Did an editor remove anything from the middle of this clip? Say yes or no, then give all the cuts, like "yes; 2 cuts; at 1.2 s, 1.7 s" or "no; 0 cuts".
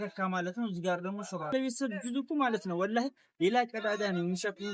yes; 1 cut; at 1.5 s